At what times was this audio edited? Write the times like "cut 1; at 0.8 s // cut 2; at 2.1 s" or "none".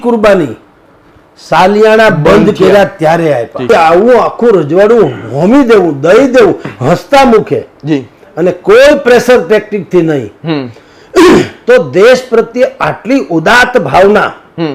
cut 1; at 3.7 s